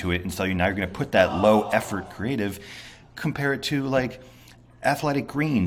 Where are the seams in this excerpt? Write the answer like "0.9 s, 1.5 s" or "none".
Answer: none